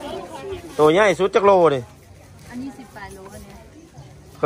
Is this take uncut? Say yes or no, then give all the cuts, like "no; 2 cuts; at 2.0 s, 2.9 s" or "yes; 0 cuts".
yes; 0 cuts